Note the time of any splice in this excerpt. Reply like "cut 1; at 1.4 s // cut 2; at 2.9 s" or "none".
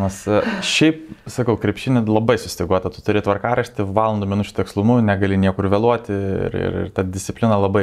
none